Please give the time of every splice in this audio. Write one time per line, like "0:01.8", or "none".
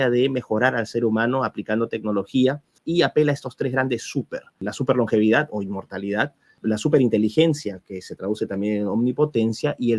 0:02.8
0:04.6
0:06.6